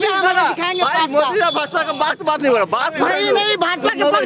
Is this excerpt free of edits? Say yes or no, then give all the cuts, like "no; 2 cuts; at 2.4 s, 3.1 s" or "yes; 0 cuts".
yes; 0 cuts